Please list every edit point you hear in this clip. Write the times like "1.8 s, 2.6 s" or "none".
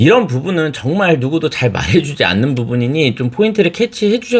none